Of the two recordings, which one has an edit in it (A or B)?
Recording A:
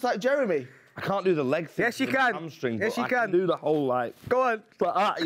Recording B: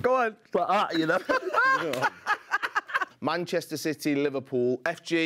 B